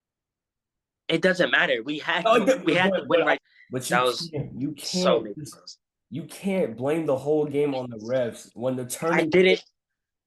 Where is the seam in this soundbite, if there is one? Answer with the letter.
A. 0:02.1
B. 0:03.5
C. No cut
B